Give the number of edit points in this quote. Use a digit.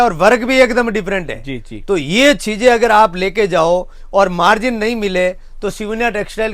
0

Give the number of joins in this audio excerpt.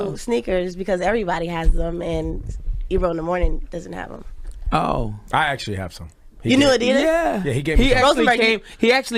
1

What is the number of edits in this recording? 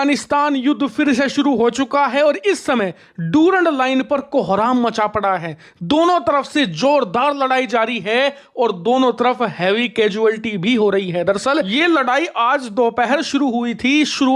0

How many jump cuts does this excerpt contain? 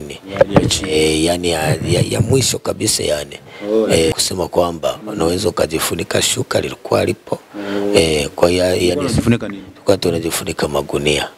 1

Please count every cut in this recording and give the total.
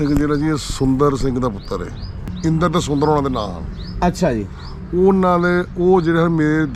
1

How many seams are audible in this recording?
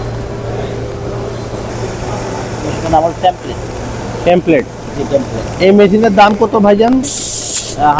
1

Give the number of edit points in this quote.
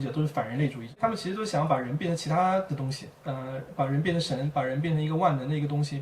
1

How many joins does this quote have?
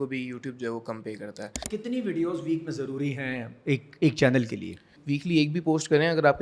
2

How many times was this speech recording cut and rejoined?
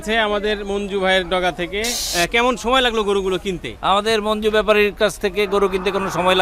1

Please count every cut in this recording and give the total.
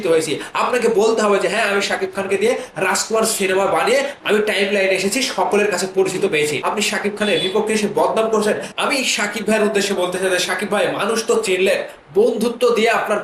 2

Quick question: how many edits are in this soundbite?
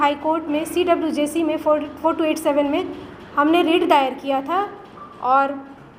0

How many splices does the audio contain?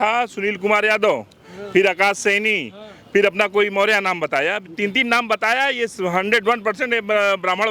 0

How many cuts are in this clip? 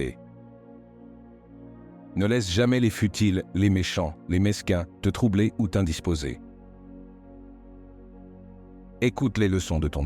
0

